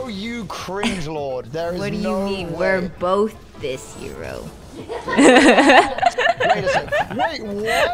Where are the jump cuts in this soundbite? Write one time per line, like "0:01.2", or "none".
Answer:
none